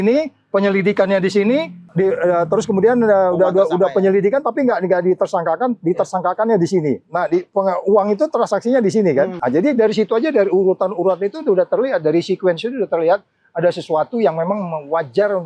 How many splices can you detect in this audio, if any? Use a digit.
2